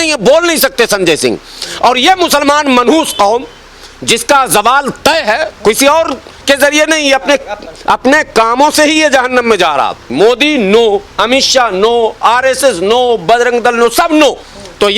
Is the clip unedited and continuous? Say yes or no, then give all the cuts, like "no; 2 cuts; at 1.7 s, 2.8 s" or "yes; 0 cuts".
no; 1 cut; at 10.1 s